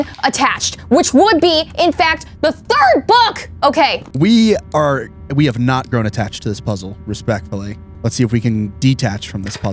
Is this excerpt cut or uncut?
cut